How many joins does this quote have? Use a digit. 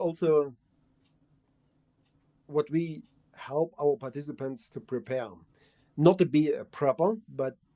0